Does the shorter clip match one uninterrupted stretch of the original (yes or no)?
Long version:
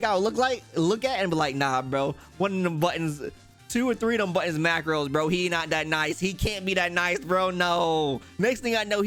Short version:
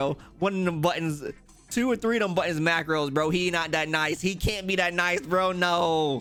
yes